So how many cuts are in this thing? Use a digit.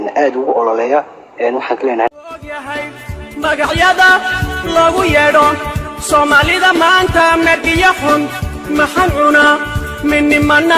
1